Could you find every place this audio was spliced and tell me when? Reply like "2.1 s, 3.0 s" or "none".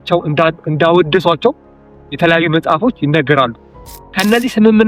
3.8 s